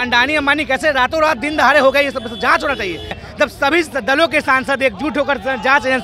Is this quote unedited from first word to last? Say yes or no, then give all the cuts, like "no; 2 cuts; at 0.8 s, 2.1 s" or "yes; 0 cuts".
no; 1 cut; at 3.2 s